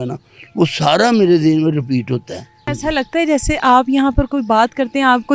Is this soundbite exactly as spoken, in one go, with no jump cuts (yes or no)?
no